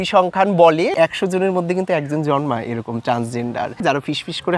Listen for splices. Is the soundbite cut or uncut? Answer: cut